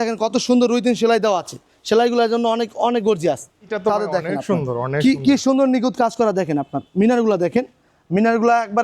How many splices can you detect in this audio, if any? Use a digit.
1